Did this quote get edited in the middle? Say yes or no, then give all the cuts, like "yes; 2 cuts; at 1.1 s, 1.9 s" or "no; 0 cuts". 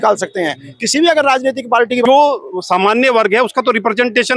yes; 1 cut; at 2.0 s